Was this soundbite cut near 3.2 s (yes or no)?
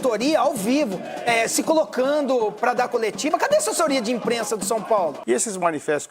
no